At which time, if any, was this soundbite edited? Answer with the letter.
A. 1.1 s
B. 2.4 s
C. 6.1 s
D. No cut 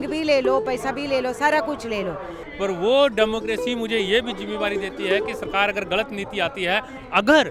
B